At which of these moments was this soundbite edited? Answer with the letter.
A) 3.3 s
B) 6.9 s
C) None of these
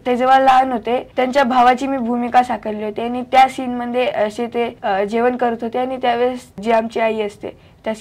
C